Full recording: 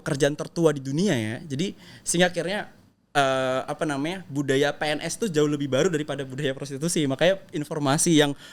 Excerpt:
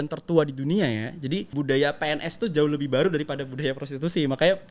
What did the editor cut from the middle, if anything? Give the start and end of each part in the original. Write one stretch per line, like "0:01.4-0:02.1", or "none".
0:01.7-0:04.3

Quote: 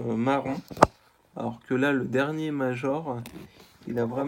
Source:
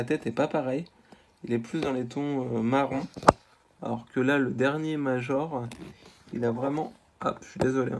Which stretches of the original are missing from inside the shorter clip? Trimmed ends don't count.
none

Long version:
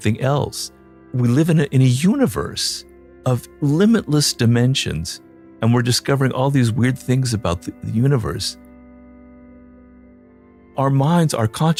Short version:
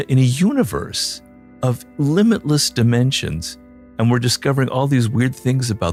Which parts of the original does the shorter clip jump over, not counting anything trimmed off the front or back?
none

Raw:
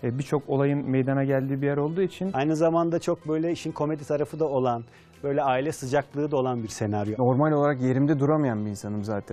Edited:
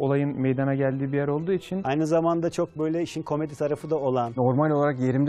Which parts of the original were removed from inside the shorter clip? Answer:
0:04.8-0:07.1

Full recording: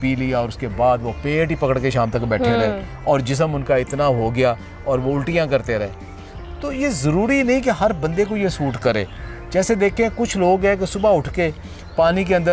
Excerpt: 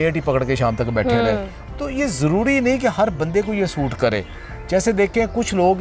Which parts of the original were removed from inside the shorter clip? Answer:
0:02.9-0:06.4

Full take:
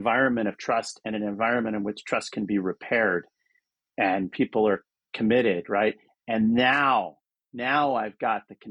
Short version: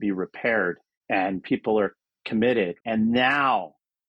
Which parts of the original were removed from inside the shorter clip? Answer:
0:03.4-0:03.8
0:05.6-0:06.2

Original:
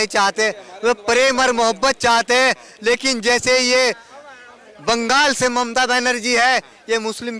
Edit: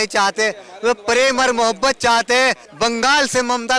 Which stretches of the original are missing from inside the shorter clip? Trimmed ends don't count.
0:02.7-0:04.7

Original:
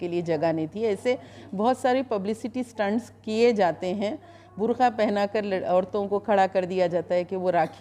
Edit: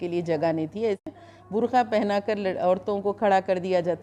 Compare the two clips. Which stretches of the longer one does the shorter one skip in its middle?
0:01.0-0:04.1

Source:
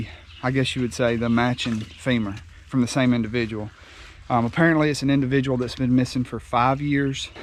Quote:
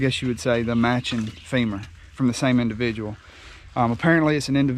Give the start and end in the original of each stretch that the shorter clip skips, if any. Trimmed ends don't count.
none

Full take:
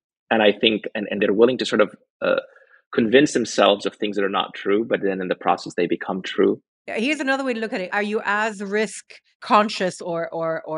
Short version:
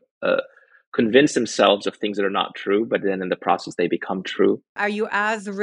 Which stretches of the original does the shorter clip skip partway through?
0:06.7-0:07.9

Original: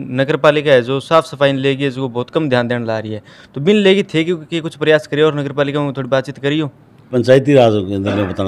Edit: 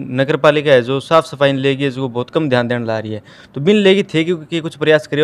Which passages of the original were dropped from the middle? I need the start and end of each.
none

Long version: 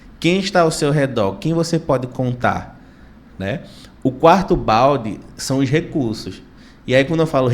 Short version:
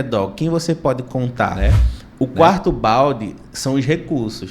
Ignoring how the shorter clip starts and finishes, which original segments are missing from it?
0:02.6-0:03.4

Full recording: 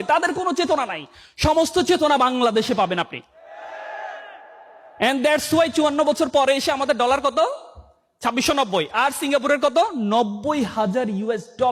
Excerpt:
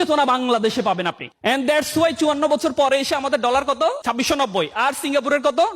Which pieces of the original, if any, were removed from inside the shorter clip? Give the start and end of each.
0:03.2-0:04.8
0:07.6-0:08.2

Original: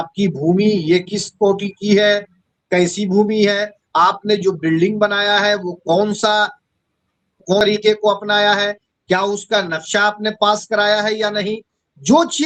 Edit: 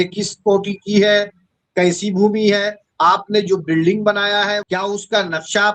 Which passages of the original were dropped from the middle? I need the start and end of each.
0:05.5-0:09.0

